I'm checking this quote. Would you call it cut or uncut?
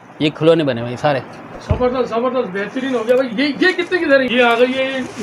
cut